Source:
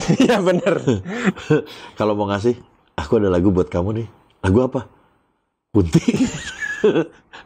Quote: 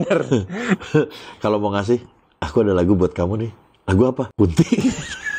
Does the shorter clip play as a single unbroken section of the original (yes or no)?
no